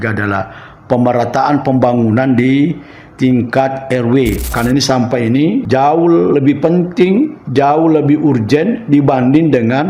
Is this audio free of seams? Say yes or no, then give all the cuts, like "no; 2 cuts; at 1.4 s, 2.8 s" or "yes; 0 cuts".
no; 3 cuts; at 4.5 s, 5.6 s, 7.4 s